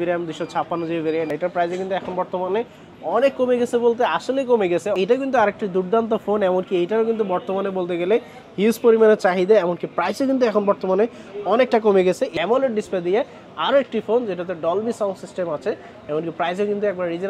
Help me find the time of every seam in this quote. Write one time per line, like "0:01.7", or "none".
0:01.3
0:05.0
0:12.3